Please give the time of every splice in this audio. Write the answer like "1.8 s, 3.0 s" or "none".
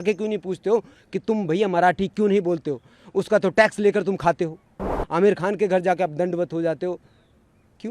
5.0 s